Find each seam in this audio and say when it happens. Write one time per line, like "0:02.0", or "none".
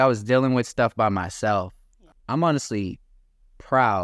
0:02.0